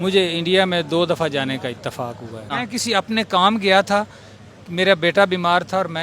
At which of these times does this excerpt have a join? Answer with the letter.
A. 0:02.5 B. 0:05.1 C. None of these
A